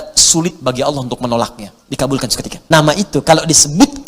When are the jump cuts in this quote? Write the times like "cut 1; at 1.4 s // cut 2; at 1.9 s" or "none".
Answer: cut 1; at 2.5 s

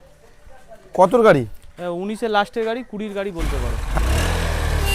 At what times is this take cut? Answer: cut 1; at 3.8 s

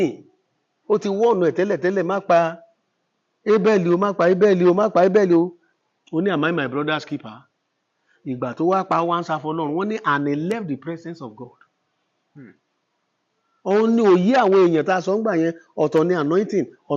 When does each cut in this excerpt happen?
none

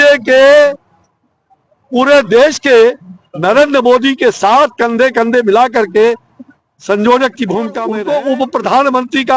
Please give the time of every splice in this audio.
cut 1; at 7.9 s

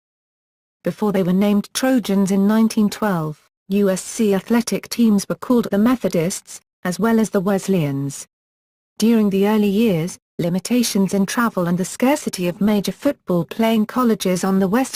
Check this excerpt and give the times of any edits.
none

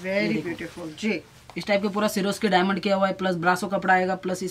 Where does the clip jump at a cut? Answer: none

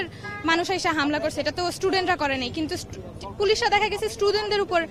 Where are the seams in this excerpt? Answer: none

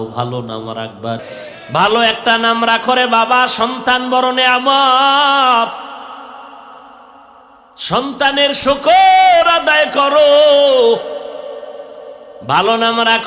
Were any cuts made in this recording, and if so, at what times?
cut 1; at 1.2 s

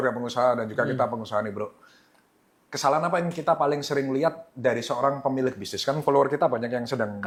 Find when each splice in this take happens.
none

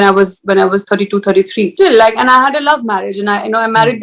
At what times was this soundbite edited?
cut 1; at 1.7 s

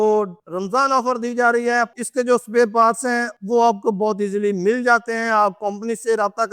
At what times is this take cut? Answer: cut 1; at 2.0 s

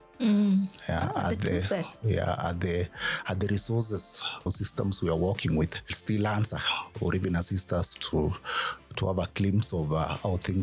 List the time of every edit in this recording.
cut 1; at 4.5 s

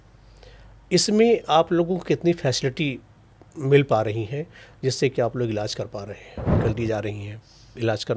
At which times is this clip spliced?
cut 1; at 6.5 s

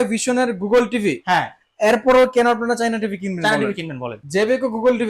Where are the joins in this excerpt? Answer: cut 1; at 4.2 s

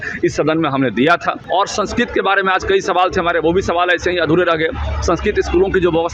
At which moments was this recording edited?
cut 1; at 1.4 s

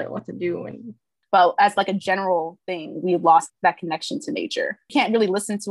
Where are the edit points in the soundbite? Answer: cut 1; at 1.1 s // cut 2; at 3.5 s // cut 3; at 4.9 s

